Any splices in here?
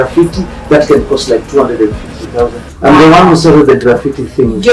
yes; 1 cut; at 2.6 s

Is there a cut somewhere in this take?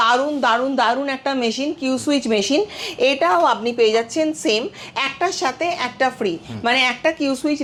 no; 0 cuts

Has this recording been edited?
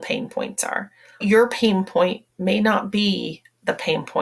yes; 1 cut; at 1.2 s

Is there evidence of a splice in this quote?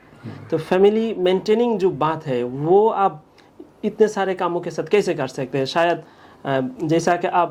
no; 0 cuts

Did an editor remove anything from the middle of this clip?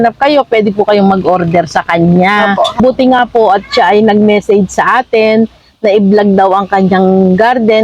yes; 1 cut; at 2.8 s

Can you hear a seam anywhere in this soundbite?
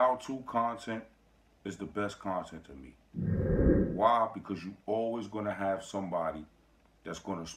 yes; 2 cuts; at 2.8 s, 3.9 s

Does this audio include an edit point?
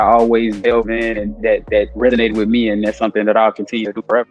no; 0 cuts

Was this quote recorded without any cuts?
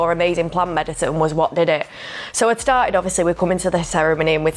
yes; 0 cuts

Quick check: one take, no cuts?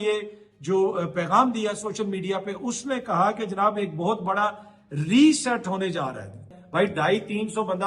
no; 1 cut; at 6.5 s

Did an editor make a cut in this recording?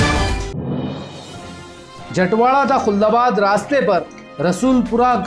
yes; 1 cut; at 1.1 s

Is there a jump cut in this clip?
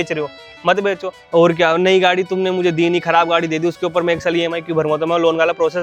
yes; 1 cut; at 1.1 s

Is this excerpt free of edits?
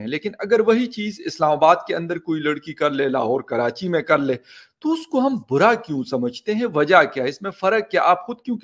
yes; 0 cuts

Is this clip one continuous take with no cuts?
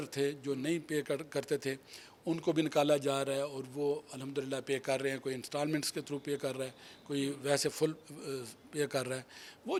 yes; 0 cuts

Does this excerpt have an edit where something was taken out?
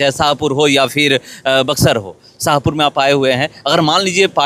no; 0 cuts

